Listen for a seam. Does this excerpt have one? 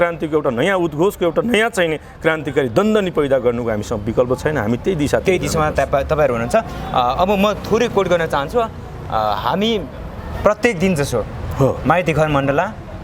no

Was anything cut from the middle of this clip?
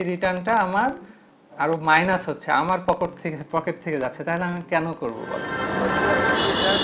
no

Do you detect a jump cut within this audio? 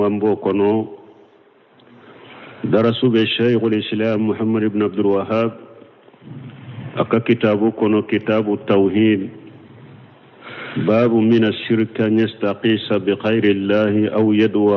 no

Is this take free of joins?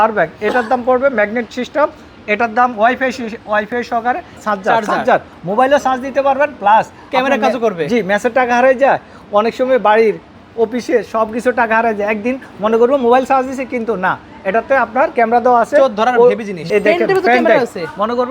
no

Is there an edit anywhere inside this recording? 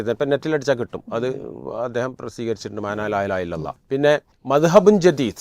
yes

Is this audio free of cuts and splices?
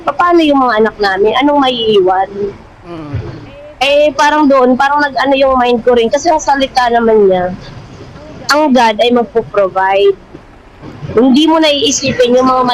yes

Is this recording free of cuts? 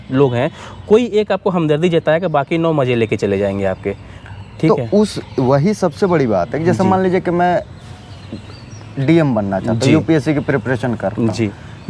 yes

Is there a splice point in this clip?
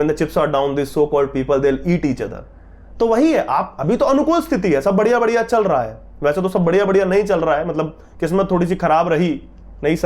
no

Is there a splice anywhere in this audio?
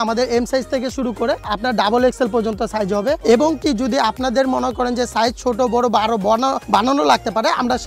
no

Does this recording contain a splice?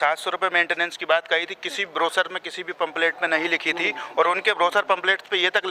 no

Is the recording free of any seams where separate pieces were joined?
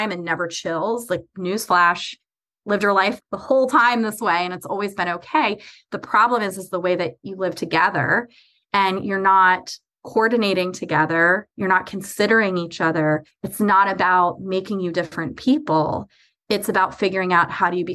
no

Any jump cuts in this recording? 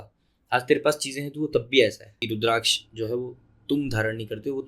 yes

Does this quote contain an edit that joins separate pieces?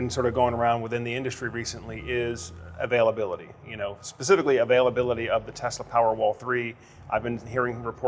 no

